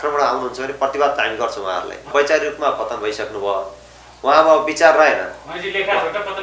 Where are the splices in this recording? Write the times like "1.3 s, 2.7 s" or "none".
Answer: 2.1 s